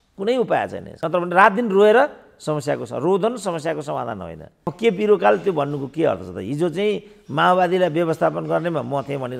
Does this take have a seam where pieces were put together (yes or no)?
yes